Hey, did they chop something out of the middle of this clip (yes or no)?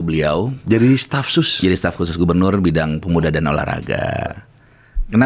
no